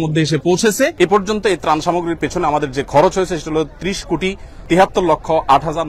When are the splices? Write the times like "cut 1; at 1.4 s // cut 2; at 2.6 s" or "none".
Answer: cut 1; at 0.9 s